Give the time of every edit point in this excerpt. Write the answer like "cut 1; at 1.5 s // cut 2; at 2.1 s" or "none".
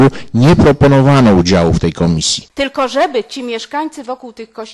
cut 1; at 2.4 s